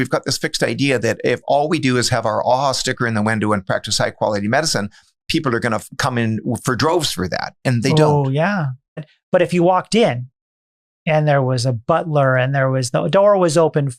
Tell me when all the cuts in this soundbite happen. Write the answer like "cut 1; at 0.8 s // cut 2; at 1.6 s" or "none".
cut 1; at 9.0 s